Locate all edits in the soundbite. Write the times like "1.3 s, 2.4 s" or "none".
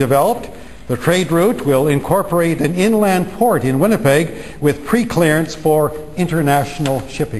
none